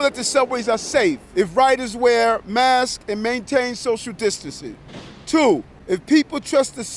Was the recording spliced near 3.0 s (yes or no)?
no